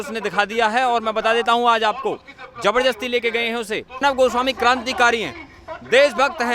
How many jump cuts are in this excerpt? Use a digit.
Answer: 1